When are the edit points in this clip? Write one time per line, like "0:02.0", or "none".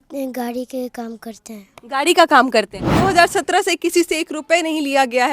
0:03.0